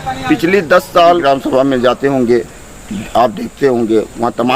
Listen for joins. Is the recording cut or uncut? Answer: cut